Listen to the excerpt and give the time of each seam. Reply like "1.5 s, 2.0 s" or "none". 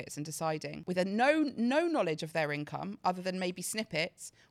none